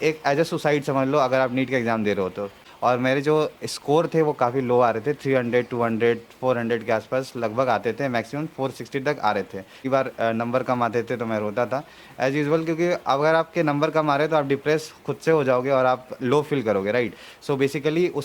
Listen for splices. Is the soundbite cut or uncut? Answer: cut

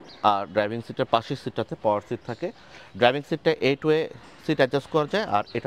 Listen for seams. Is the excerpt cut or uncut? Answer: uncut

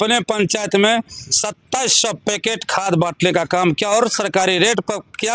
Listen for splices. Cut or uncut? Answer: uncut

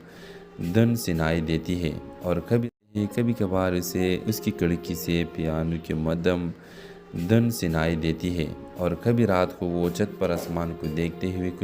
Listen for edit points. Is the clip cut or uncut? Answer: cut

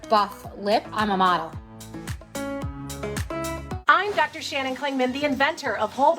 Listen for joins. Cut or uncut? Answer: cut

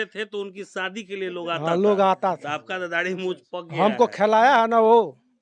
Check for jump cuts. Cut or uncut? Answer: uncut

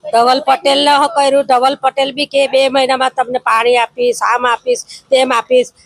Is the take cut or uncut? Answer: uncut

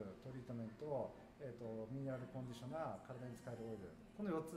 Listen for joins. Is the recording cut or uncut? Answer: uncut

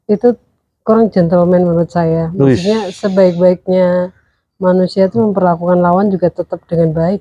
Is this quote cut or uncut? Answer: uncut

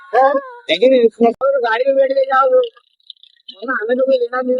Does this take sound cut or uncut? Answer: cut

